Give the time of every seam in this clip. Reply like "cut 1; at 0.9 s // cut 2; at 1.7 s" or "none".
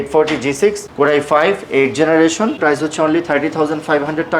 cut 1; at 0.8 s // cut 2; at 2.6 s

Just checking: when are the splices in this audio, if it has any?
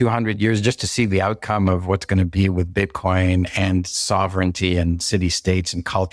none

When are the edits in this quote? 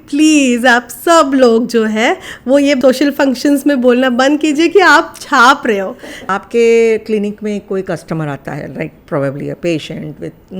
cut 1; at 2.8 s // cut 2; at 6.2 s

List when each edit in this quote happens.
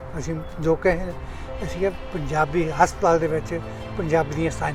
none

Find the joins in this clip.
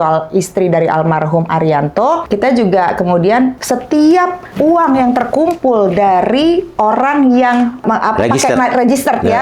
cut 1; at 2.2 s // cut 2; at 3.6 s // cut 3; at 4.5 s // cut 4; at 7.8 s

